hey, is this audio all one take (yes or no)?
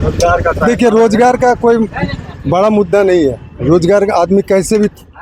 yes